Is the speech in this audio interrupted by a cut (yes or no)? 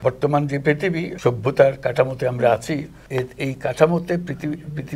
yes